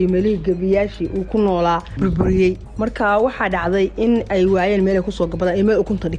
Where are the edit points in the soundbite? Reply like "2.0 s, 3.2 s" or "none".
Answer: 1.9 s